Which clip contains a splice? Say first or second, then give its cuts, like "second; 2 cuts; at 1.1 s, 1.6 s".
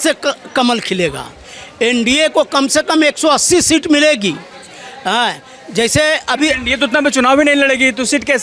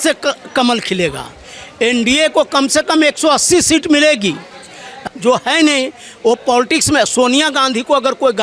second; 1 cut; at 5.0 s